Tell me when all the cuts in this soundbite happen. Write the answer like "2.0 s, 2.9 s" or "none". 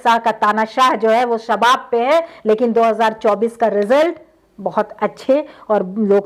none